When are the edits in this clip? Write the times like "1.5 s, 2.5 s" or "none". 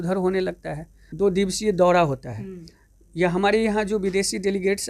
1.0 s